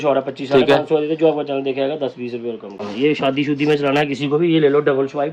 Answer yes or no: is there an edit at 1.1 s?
no